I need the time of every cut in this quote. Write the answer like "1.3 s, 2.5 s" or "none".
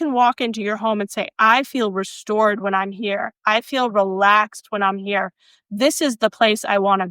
none